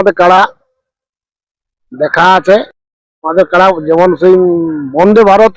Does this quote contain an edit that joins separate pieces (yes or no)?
no